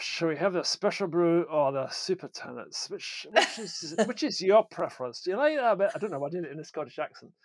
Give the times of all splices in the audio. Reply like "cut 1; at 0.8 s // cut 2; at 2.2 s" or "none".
none

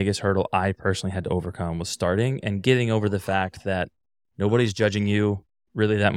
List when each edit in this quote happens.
none

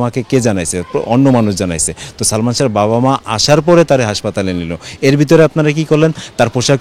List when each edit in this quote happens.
none

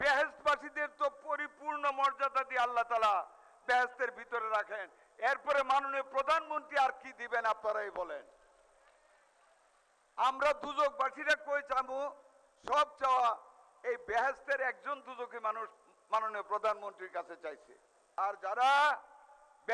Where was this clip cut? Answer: cut 1; at 18.2 s

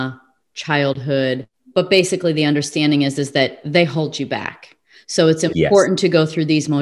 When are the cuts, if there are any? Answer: cut 1; at 1.5 s

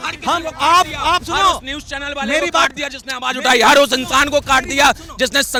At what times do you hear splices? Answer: none

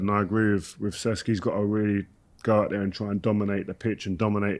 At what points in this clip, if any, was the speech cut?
none

